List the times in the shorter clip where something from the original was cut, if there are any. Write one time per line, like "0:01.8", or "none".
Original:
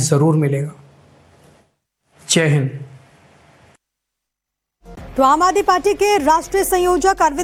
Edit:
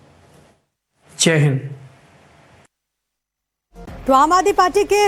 none